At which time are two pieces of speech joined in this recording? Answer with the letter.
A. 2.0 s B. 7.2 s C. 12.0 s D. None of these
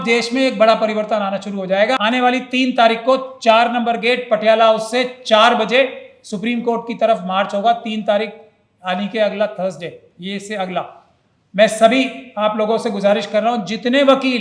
A